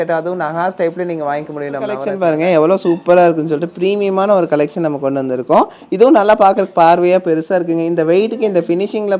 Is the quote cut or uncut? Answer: cut